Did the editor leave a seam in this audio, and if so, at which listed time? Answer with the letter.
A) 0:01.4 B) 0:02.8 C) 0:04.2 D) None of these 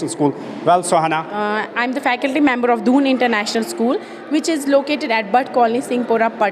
A